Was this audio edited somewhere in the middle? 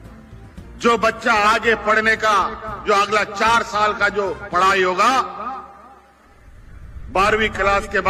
no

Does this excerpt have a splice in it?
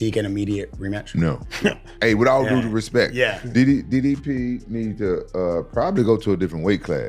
yes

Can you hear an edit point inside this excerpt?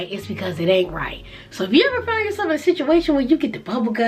no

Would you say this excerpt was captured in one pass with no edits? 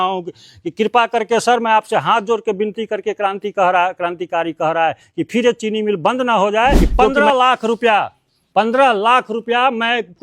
no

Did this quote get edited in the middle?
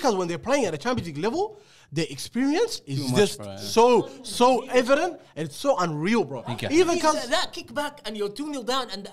no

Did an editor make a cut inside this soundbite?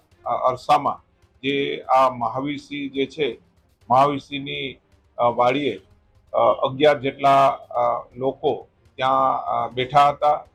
no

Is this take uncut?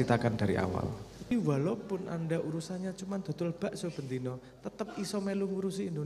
no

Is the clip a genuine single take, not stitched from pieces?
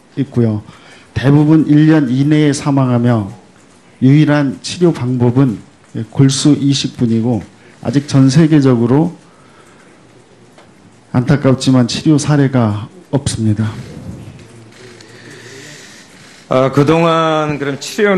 no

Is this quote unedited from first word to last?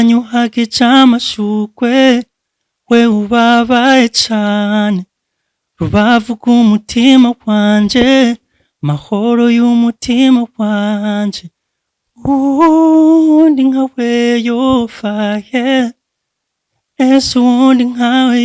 yes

